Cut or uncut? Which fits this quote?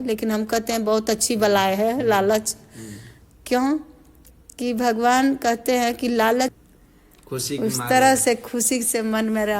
cut